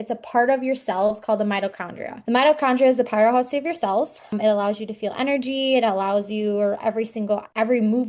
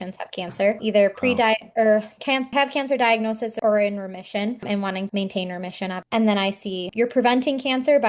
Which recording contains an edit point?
second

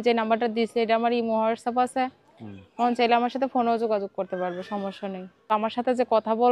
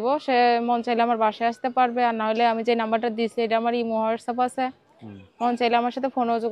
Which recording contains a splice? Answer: first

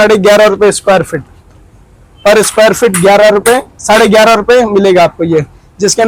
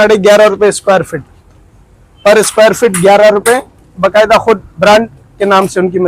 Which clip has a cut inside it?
second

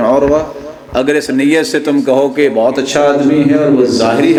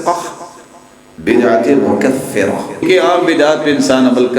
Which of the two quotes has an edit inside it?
second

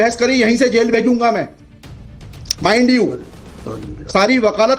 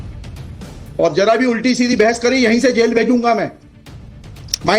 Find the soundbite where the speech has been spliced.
second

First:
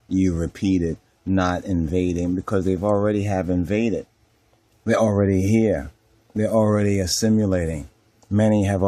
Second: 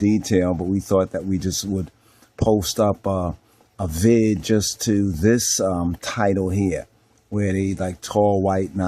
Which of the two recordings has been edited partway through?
second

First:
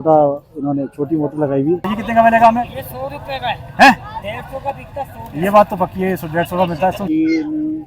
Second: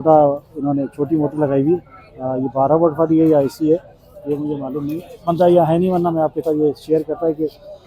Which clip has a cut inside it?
first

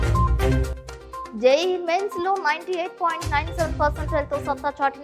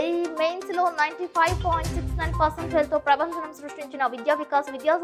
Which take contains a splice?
first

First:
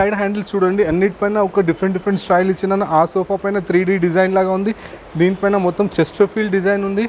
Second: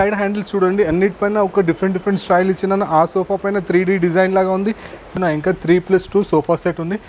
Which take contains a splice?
second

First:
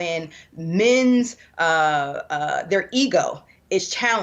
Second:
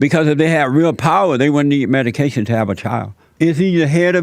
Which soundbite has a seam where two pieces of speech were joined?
second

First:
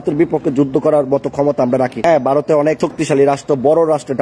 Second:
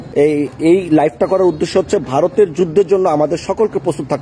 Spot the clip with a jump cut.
first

